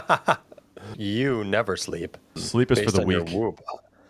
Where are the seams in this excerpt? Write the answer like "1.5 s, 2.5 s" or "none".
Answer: 0.9 s, 2.4 s